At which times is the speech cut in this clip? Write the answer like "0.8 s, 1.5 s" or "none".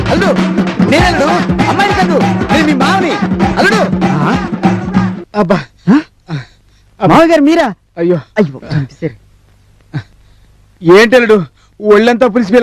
none

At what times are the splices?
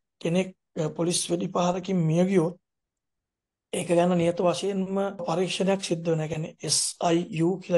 5.2 s

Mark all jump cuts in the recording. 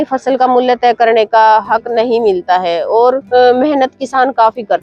3.2 s

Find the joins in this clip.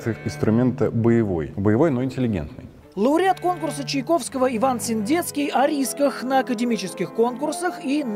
none

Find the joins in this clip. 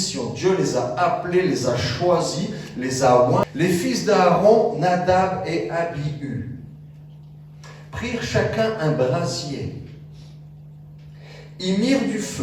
3.5 s

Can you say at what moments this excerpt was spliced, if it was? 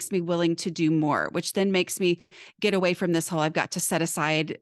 none

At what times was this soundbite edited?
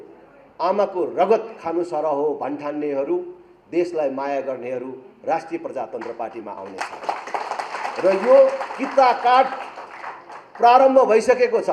none

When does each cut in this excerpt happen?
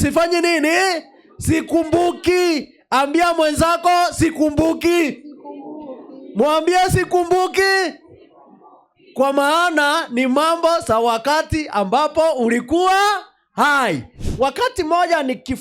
14.1 s

